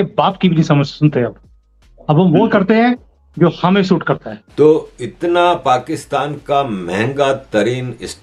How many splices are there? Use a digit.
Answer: 1